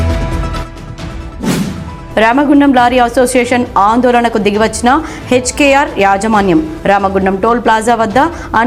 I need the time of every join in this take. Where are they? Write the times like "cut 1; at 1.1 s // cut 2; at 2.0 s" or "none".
none